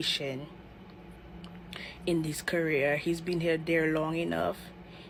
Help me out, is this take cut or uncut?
uncut